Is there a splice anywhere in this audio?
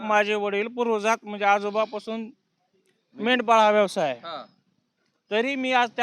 no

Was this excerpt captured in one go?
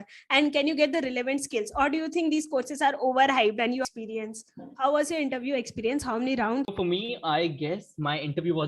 no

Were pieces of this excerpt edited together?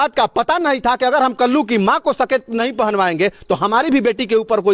no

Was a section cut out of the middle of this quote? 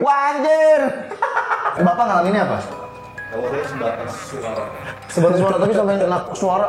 yes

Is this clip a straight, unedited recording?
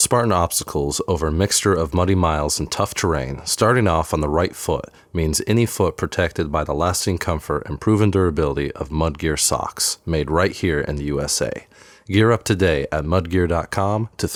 yes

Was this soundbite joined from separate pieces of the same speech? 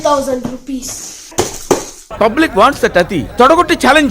yes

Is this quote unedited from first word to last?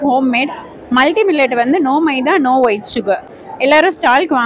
yes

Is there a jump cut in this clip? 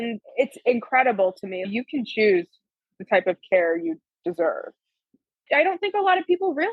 yes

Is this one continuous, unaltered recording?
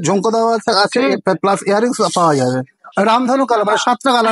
no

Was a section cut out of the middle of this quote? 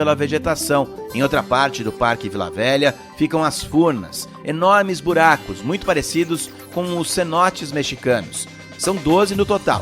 yes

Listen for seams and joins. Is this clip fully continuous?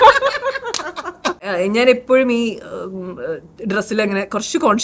no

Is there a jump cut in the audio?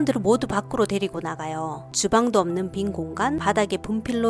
yes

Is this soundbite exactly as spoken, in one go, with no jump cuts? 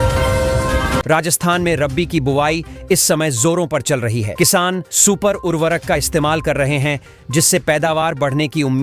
no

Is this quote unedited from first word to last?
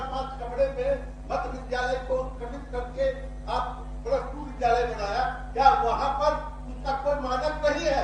yes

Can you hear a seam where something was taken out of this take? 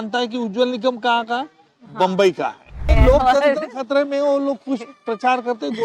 yes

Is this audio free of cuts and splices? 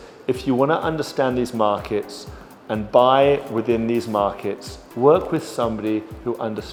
yes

